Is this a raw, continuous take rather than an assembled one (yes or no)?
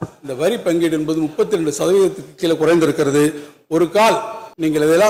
yes